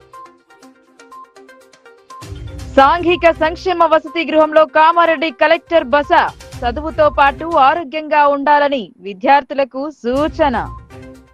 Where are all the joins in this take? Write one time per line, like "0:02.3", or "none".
0:02.5